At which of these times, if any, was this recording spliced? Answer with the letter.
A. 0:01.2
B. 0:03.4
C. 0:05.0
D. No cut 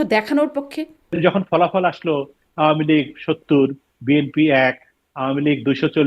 A